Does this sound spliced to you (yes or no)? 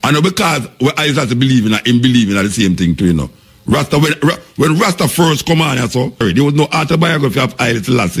yes